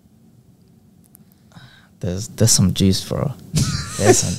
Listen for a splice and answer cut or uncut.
uncut